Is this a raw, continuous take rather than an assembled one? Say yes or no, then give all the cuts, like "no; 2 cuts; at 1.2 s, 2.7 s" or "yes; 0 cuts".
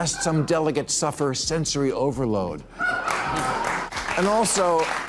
no; 1 cut; at 3.9 s